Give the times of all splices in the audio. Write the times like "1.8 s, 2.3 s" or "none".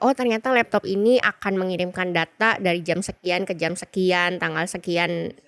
none

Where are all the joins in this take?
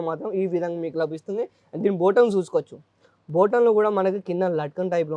none

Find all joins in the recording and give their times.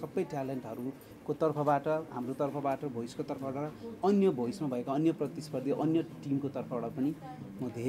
none

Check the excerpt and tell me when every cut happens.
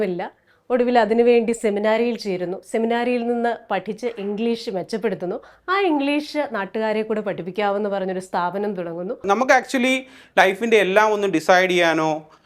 9.2 s

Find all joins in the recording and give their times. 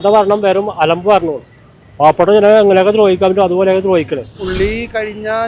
4.4 s

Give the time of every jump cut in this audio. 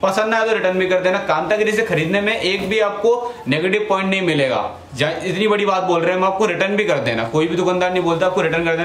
none

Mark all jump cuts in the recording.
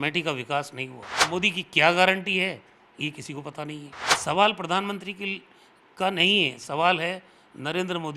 1.3 s, 4.2 s

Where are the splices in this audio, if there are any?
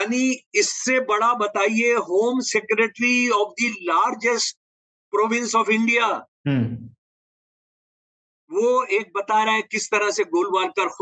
none

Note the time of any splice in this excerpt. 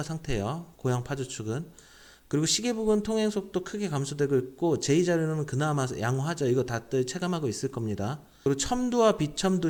none

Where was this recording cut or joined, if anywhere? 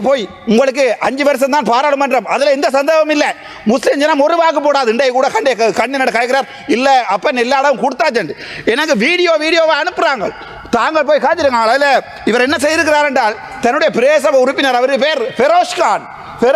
none

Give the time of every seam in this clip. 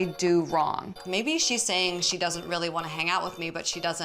1.0 s

